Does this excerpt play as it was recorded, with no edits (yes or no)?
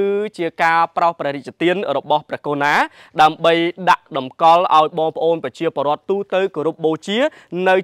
yes